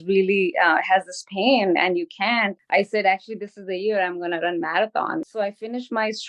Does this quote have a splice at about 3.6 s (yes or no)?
no